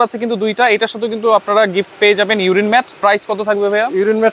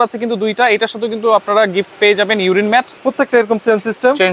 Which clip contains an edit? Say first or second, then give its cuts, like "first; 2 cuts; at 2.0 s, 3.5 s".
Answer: second; 1 cut; at 3.0 s